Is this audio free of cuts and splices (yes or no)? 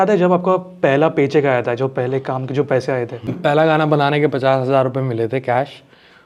yes